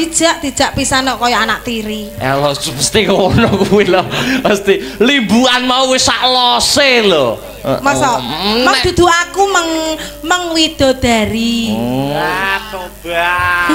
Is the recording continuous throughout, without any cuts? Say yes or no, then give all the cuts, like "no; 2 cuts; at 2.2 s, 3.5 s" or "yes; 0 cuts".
yes; 0 cuts